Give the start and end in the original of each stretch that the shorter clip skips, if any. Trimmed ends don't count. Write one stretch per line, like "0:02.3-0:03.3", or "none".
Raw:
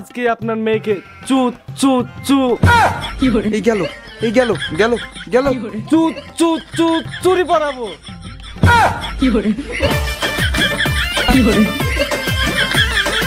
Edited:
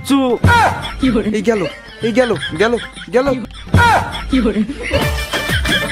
0:05.7-0:08.4